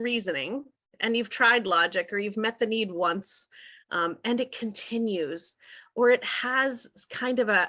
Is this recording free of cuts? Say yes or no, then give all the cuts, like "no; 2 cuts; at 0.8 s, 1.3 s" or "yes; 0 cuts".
yes; 0 cuts